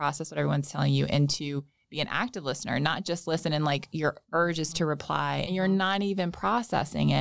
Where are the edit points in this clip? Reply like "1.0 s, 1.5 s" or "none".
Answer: 5.4 s